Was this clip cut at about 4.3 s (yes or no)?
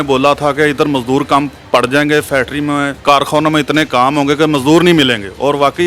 no